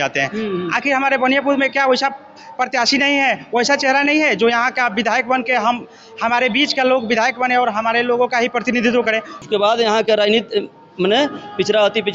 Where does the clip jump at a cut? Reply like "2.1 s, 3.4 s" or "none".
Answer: 9.4 s